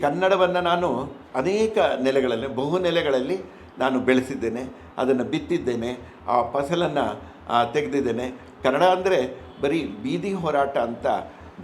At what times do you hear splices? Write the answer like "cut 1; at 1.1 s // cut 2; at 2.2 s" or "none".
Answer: cut 1; at 1.2 s